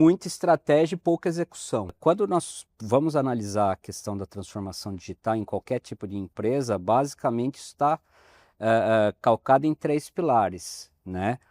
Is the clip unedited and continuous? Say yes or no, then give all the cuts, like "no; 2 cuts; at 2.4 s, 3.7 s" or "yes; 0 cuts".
no; 1 cut; at 2.0 s